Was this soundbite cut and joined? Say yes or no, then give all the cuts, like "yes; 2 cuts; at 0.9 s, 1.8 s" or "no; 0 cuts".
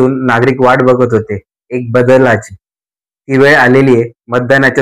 no; 0 cuts